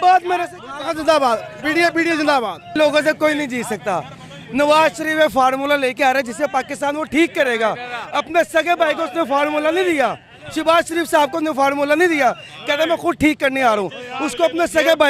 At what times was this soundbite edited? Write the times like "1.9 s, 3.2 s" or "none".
2.8 s